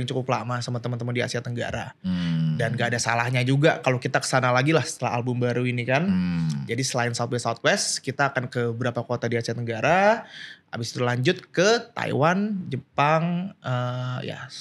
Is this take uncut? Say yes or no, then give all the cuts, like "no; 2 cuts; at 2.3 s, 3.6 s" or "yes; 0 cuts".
yes; 0 cuts